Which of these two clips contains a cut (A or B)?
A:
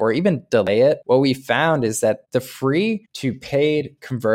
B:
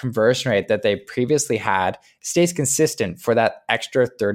A